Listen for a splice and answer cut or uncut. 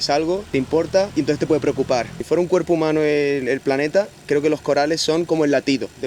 cut